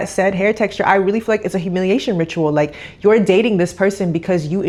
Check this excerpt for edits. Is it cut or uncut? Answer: uncut